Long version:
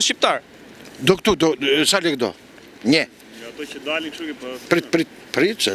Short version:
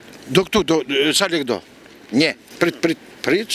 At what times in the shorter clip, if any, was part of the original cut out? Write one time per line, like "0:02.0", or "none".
0:02.5